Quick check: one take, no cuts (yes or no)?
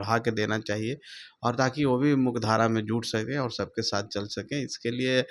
yes